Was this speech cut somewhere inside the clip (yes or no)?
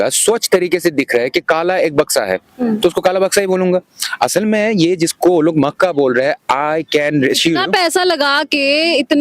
no